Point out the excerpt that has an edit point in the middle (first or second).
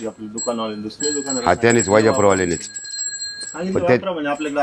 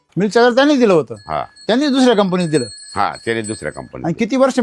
first